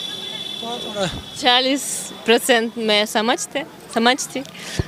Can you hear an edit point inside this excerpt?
no; 0 cuts

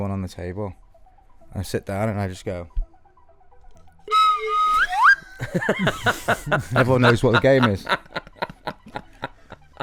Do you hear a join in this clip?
no; 0 cuts

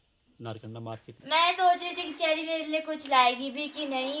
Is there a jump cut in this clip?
yes; 1 cut; at 1.3 s

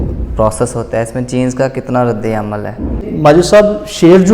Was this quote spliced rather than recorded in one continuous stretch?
yes; 1 cut; at 3.1 s

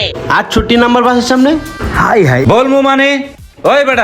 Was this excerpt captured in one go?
no; 1 cut; at 2.4 s

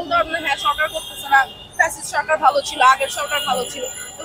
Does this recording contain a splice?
no; 0 cuts

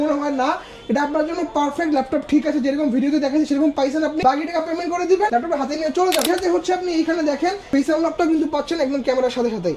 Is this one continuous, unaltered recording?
no; 4 cuts; at 4.2 s, 5.3 s, 6.3 s, 7.6 s

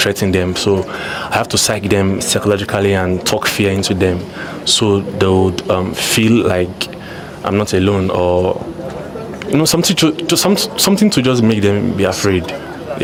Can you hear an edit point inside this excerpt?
no; 0 cuts

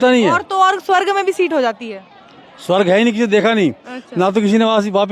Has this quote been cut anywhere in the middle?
no; 0 cuts

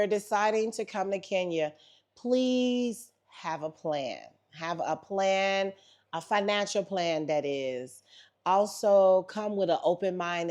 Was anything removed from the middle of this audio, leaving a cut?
no; 0 cuts

